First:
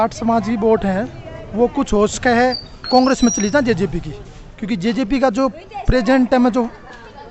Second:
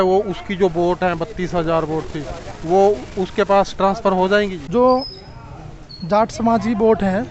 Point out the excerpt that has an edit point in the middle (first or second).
second